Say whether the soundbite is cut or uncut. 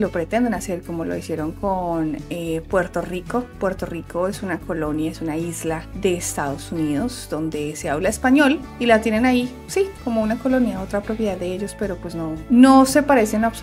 uncut